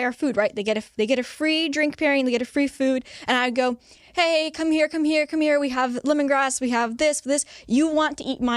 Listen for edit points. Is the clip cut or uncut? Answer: uncut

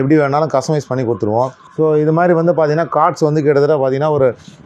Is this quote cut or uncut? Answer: cut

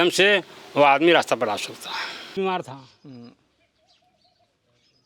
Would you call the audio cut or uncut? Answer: cut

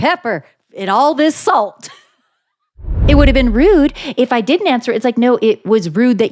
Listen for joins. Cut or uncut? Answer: cut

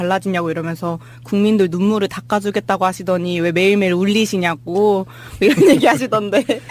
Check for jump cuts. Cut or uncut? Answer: uncut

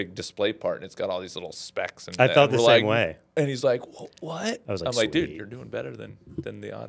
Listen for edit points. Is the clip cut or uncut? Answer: uncut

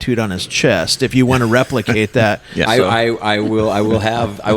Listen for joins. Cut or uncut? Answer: cut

